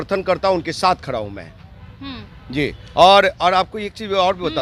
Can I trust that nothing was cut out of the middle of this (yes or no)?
yes